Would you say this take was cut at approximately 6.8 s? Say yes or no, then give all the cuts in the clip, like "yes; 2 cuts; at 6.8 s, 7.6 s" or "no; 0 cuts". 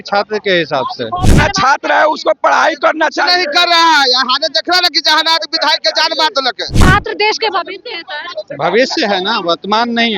yes; 2 cuts; at 1.3 s, 6.8 s